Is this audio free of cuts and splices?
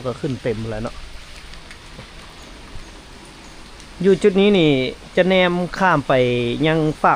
yes; 0 cuts

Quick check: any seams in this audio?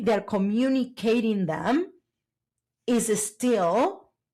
no; 0 cuts

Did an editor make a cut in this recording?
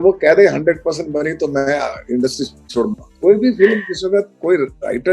no; 0 cuts

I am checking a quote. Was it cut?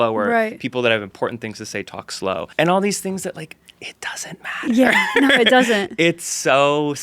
yes; 1 cut; at 2.5 s

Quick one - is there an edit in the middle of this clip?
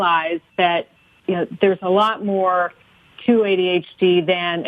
no; 0 cuts

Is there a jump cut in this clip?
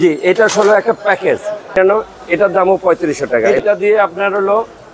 yes; 2 cuts; at 1.8 s, 3.6 s

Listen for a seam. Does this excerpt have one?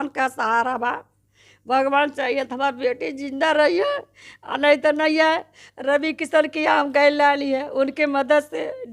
no; 0 cuts

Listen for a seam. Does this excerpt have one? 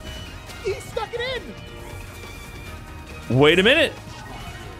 no; 0 cuts

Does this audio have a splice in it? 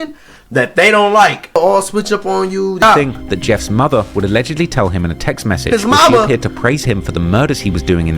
yes; 2 cuts; at 1.5 s, 2.8 s

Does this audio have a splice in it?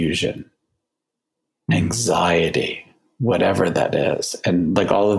no; 0 cuts

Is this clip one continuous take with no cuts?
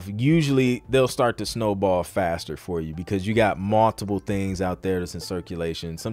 yes; 0 cuts

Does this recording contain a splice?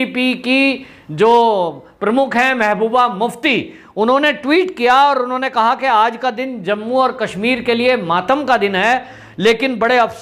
no; 0 cuts

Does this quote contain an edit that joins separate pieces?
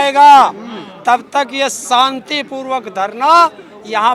no; 0 cuts

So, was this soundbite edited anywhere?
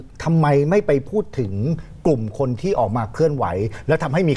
no; 0 cuts

